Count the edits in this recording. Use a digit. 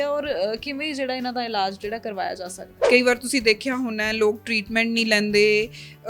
1